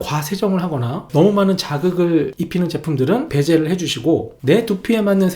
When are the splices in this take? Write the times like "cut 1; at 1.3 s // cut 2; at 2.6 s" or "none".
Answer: cut 1; at 1.0 s // cut 2; at 2.4 s // cut 3; at 3.3 s